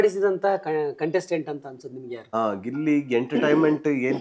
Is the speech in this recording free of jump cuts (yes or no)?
no